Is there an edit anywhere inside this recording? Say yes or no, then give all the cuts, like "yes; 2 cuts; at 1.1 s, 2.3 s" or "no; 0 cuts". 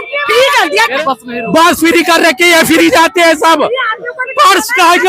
yes; 1 cut; at 1.0 s